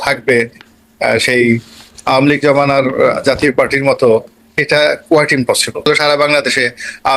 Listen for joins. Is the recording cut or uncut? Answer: cut